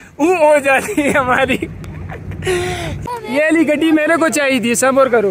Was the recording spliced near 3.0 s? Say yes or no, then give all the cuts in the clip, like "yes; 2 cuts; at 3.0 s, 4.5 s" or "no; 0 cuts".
yes; 1 cut; at 3.0 s